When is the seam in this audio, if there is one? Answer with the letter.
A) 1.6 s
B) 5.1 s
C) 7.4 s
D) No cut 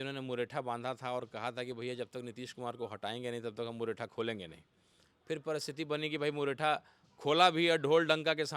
D